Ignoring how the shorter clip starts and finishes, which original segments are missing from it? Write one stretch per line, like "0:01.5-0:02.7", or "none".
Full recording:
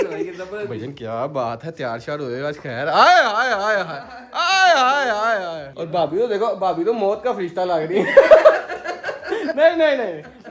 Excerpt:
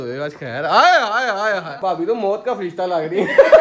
0:04.0-0:06.6